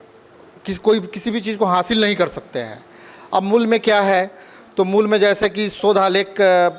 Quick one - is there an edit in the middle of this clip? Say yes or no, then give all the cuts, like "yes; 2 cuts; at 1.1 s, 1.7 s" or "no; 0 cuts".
no; 0 cuts